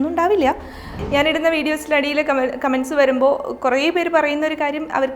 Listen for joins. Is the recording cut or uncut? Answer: cut